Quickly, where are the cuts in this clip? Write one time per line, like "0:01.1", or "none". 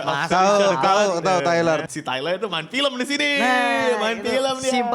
0:01.8

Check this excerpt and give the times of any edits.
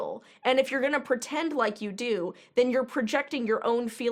none

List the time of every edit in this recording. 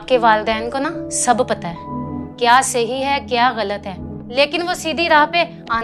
none

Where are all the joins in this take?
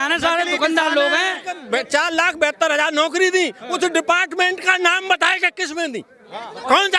0:01.6

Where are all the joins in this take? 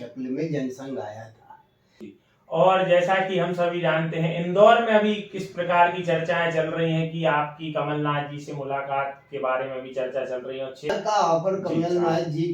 0:02.2
0:10.9

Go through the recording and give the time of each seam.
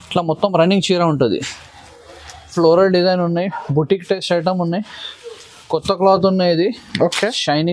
0:02.5

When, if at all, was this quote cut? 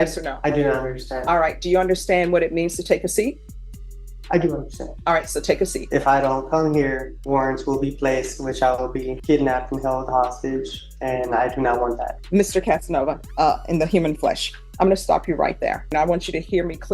0:05.8
0:07.1
0:09.1
0:12.2
0:13.2
0:15.9

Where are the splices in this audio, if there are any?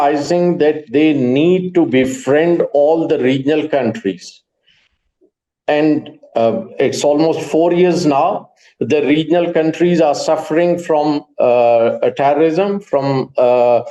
none

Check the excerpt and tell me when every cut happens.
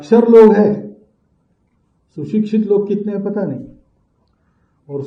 none

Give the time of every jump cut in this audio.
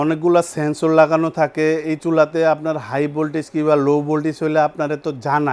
none

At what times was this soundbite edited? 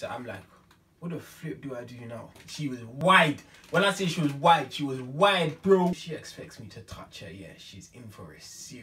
0:02.3
0:06.2

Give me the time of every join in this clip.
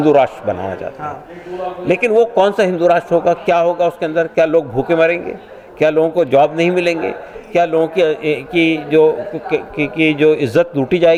none

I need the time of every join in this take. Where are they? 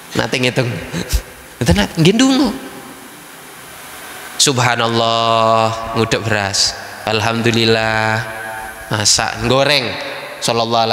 none

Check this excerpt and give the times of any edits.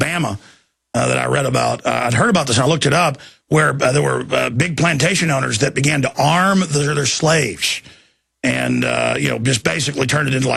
0:06.3

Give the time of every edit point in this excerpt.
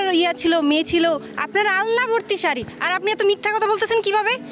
0:01.3

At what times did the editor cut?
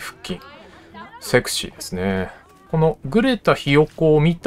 0:02.5

